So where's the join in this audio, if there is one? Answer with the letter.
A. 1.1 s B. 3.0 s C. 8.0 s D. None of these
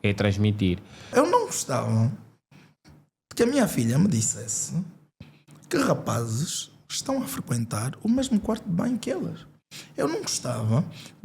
A